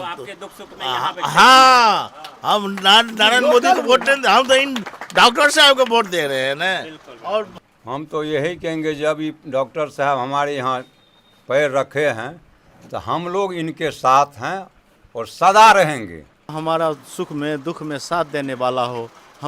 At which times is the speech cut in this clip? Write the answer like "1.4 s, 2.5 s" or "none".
7.7 s, 16.5 s